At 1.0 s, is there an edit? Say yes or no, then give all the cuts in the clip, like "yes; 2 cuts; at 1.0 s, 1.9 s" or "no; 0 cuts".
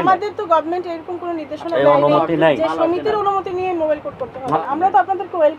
no; 1 cut; at 4.5 s